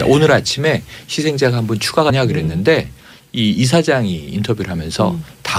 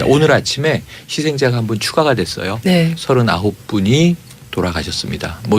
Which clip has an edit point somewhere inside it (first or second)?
second